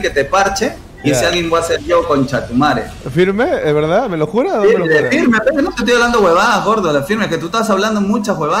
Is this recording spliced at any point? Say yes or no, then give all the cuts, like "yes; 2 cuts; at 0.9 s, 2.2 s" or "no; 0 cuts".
no; 0 cuts